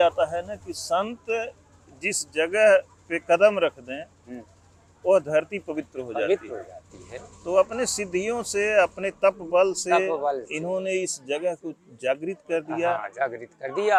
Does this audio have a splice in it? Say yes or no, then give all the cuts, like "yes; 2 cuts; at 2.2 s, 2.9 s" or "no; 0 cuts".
no; 0 cuts